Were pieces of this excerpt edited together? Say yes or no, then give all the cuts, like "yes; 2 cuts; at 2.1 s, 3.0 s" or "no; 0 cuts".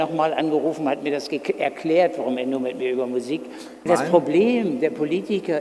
yes; 1 cut; at 3.9 s